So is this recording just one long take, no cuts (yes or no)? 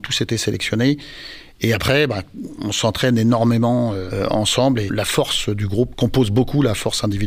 no